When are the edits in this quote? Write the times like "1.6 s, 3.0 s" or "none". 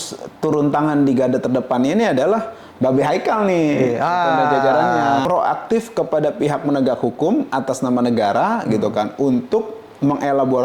5.2 s